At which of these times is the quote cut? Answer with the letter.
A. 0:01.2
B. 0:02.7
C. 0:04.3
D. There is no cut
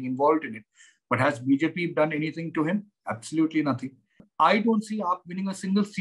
C